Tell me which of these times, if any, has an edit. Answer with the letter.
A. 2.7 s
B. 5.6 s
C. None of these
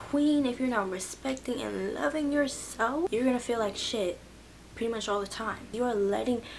B